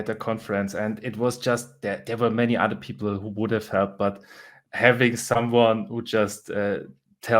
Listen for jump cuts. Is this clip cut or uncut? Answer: cut